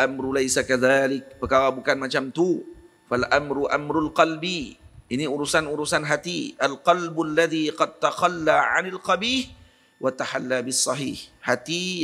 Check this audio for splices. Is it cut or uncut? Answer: uncut